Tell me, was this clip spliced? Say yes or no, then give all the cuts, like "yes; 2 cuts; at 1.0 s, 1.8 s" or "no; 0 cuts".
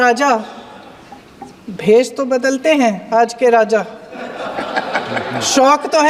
no; 0 cuts